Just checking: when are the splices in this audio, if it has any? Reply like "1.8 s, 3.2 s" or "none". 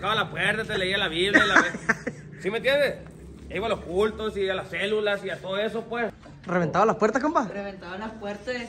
6.3 s

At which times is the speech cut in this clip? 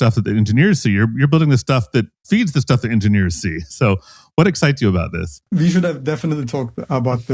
5.4 s

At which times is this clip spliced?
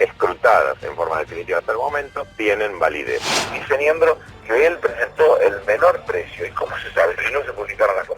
3.3 s, 7.2 s

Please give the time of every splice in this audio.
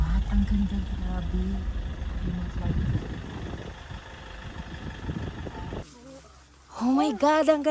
5.8 s

